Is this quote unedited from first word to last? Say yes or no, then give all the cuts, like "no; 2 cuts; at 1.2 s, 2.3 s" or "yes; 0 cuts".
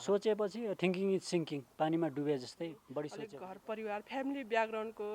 no; 1 cut; at 3.2 s